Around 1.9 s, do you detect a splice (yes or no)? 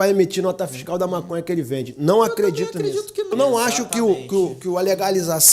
no